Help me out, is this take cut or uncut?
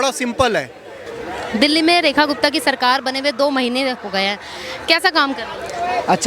cut